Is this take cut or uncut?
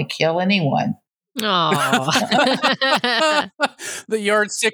uncut